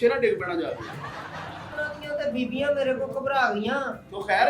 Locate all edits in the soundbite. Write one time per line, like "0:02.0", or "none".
0:01.8